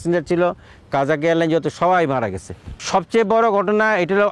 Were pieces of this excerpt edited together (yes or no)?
no